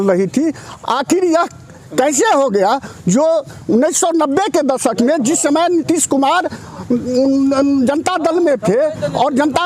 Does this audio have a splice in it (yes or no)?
no